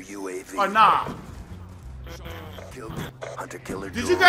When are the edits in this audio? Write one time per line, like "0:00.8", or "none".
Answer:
0:03.1